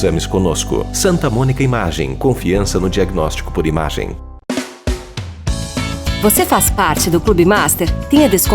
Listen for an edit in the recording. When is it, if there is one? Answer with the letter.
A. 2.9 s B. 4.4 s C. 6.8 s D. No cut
B